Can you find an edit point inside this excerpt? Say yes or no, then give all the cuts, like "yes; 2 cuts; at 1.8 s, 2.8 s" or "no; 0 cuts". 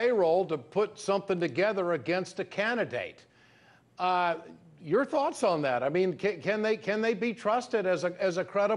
no; 0 cuts